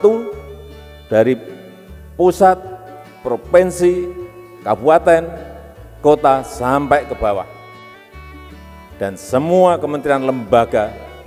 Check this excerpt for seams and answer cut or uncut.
uncut